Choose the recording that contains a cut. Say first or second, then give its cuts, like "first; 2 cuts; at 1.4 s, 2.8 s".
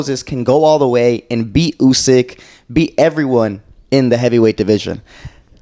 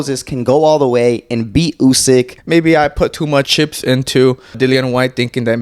second; 3 cuts; at 2.4 s, 3.5 s, 4.6 s